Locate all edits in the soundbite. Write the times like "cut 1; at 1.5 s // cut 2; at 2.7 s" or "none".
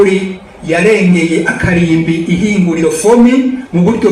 none